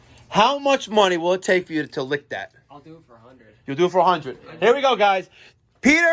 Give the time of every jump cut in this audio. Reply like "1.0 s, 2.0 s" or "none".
none